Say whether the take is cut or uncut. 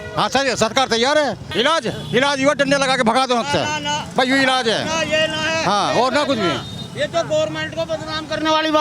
cut